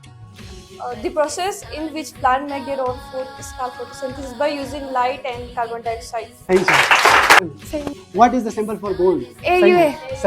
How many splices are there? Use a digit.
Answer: 2